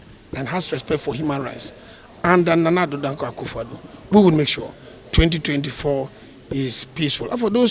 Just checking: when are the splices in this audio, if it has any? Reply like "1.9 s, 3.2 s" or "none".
none

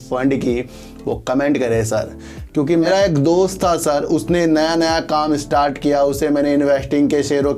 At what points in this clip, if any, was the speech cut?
2.8 s

